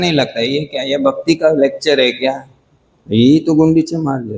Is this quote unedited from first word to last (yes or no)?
yes